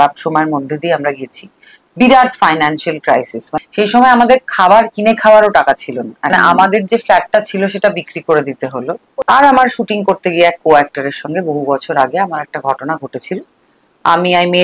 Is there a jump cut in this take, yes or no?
yes